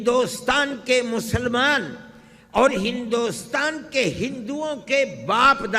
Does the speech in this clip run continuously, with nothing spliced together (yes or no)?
yes